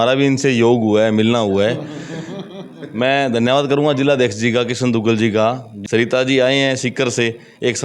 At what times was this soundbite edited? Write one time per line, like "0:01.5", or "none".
0:05.7